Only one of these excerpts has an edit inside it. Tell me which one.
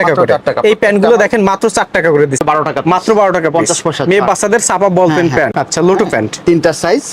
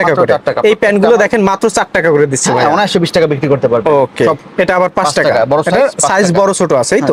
first; 2 cuts; at 2.4 s, 5.5 s

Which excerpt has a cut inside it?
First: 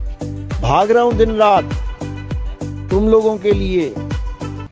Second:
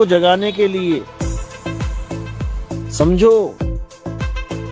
second; 1 cut; at 3.5 s

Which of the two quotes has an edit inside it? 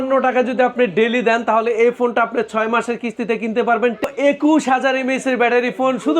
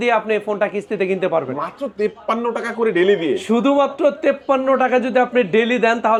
first; 1 cut; at 4.0 s

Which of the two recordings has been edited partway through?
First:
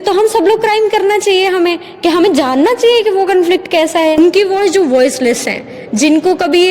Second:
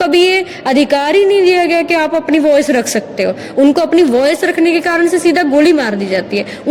first; 1 cut; at 4.2 s

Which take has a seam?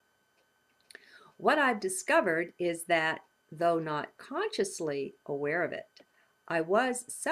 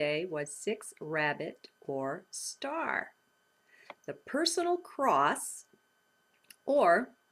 first; 1 cut; at 3.7 s

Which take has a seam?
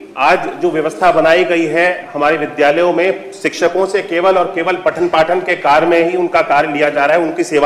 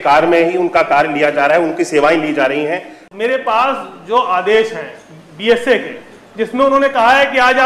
second; 1 cut; at 3.0 s

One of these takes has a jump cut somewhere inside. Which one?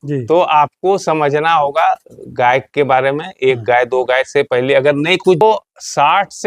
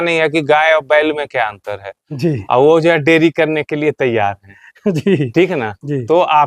first; 1 cut; at 5.4 s

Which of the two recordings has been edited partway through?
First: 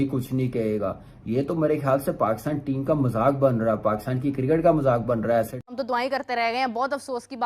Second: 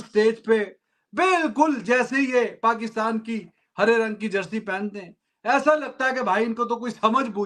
first; 1 cut; at 5.7 s

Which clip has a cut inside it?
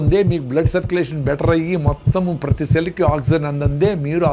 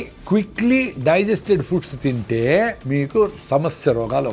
second; 1 cut; at 2.8 s

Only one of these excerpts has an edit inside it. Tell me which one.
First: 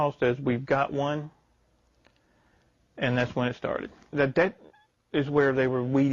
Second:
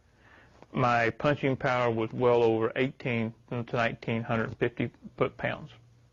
first; 1 cut; at 4.1 s

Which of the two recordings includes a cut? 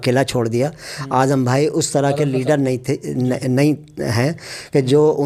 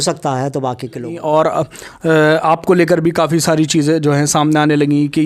second; 1 cut; at 1.2 s

